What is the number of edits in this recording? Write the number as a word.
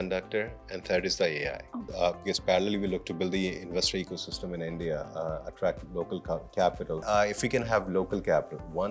two